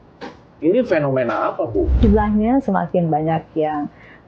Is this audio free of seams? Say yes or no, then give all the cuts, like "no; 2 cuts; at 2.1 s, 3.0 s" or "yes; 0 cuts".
no; 1 cut; at 2.0 s